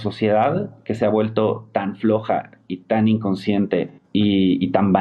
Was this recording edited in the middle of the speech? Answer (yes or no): yes